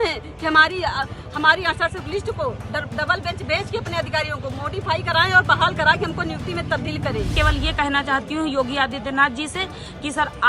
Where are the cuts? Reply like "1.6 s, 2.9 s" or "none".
7.3 s